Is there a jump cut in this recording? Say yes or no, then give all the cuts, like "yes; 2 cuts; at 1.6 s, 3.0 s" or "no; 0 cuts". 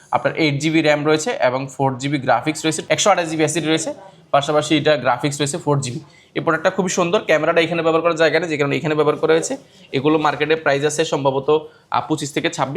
yes; 1 cut; at 2.8 s